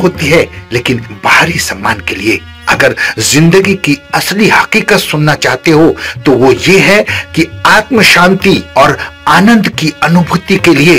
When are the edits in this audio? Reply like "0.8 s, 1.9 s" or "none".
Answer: none